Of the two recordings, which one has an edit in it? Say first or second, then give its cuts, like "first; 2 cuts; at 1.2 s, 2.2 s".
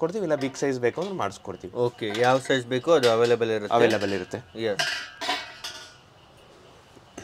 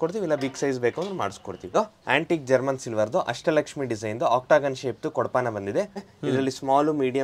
second; 2 cuts; at 1.6 s, 6.1 s